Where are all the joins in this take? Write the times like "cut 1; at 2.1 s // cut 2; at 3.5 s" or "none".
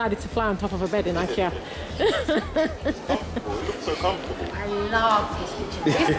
cut 1; at 4.5 s